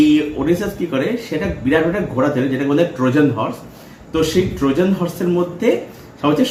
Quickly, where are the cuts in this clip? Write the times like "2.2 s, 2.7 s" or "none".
none